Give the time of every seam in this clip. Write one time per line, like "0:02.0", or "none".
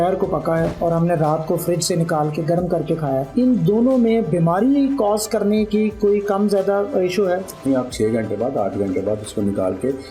0:03.3
0:07.6

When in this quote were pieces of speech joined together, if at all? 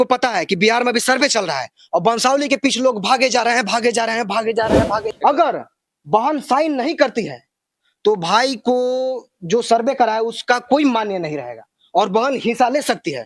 0:05.1

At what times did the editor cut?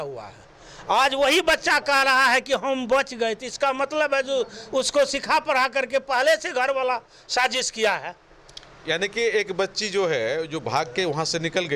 none

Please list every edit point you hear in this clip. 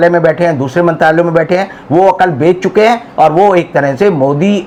none

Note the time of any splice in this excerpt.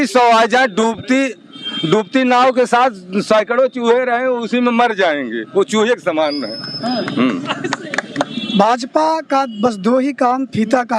0:08.4

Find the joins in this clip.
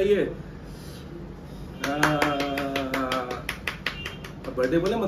none

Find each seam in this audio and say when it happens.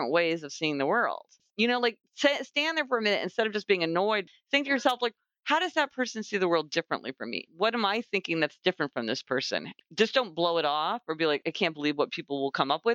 0:01.4
0:04.2
0:07.4
0:09.7
0:11.4

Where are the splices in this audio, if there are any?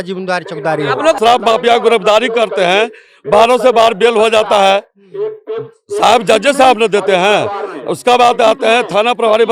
0:01.2

